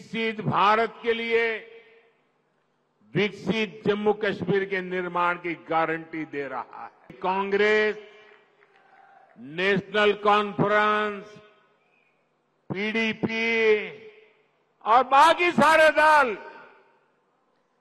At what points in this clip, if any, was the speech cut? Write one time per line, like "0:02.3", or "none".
0:07.1